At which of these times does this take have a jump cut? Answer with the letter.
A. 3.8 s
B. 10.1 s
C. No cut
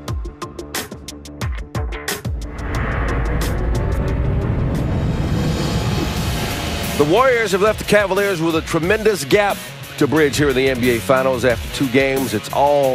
B